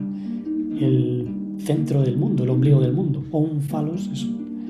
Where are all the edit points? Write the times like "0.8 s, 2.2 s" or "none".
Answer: none